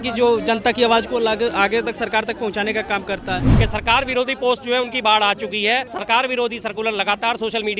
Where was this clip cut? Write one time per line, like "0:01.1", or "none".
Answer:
0:03.5
0:05.9